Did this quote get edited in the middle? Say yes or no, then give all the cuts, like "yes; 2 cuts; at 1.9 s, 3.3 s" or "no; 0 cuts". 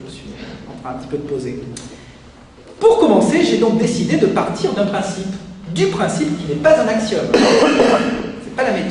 yes; 1 cut; at 7.8 s